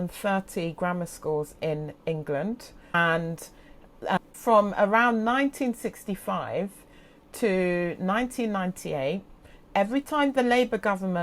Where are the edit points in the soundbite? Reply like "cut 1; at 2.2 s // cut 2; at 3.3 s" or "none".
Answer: cut 1; at 2.9 s // cut 2; at 4.3 s